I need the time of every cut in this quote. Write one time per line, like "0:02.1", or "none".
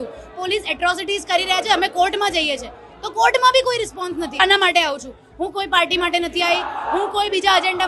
0:04.4